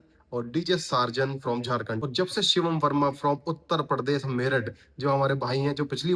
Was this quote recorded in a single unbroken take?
no; 1 cut; at 2.0 s

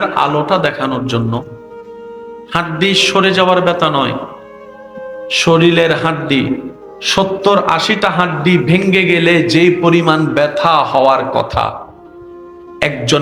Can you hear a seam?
no; 0 cuts

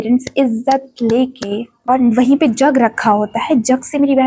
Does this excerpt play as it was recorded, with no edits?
no; 1 cut; at 1.8 s

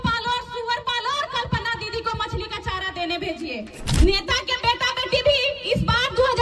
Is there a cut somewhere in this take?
yes; 1 cut; at 3.8 s

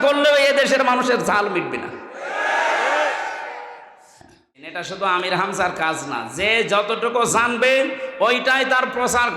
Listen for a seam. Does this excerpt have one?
yes; 1 cut; at 4.6 s

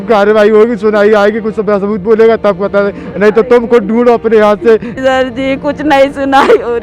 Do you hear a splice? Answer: yes; 1 cut; at 4.9 s

